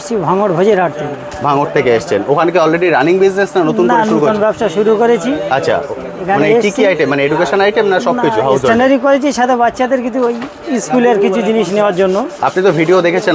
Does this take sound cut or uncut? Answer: uncut